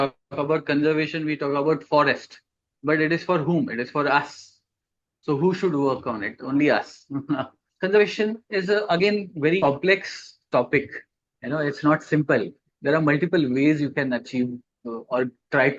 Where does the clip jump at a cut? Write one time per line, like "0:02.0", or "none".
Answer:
0:07.7

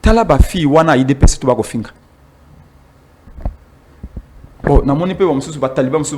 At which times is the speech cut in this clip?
none

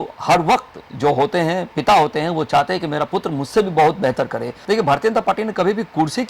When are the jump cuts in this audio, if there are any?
0:04.5

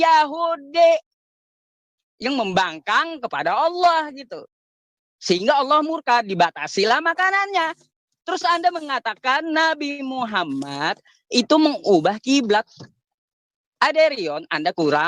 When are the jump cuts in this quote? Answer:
none

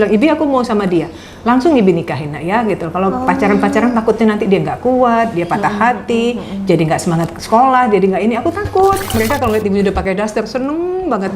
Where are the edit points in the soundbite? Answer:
0:09.1

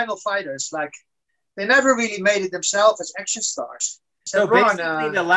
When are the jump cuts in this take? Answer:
0:04.2

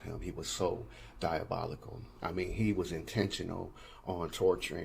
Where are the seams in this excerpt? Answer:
none

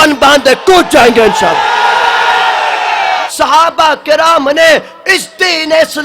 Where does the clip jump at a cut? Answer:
0:03.3

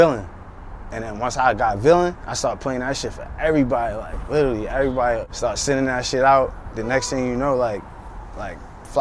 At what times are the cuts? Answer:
0:02.3
0:05.3

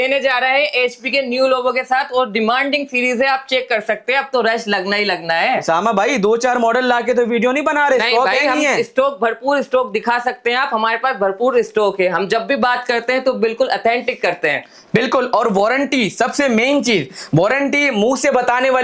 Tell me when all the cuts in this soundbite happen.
none

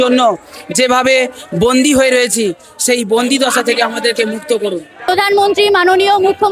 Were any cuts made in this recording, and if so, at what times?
0:05.0

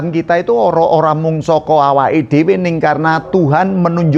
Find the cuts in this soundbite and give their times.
none

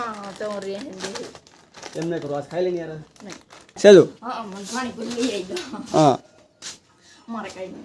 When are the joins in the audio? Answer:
0:03.7

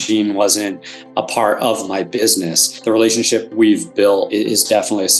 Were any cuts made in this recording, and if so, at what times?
0:02.7
0:03.5
0:04.3

